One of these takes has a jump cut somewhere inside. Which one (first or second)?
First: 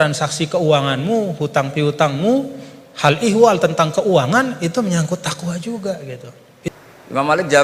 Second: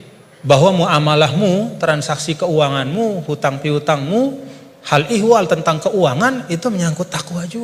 first